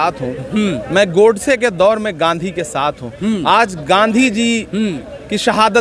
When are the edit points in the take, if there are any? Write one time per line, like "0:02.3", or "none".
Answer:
none